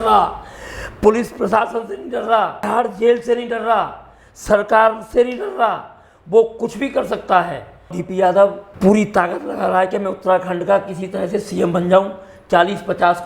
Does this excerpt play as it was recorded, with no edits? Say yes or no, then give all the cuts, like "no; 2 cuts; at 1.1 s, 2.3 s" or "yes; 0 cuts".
no; 3 cuts; at 2.7 s, 8.0 s, 8.7 s